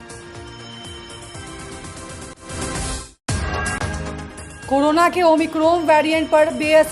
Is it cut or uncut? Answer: cut